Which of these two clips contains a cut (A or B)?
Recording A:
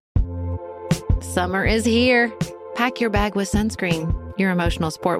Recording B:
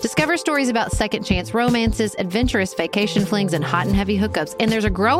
A